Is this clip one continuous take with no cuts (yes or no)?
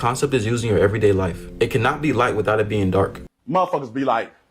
no